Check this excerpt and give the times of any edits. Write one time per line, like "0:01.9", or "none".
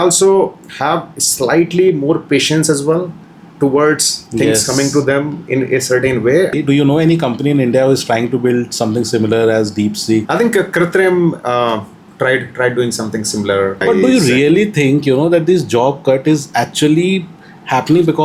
0:06.5
0:10.2
0:13.8